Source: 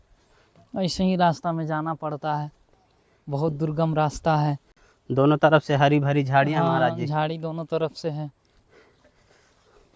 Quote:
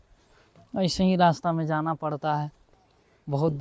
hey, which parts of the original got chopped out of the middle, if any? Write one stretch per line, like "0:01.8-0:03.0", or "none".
none